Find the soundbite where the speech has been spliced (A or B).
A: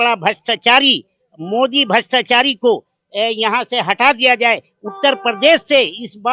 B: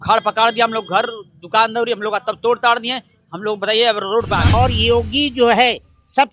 B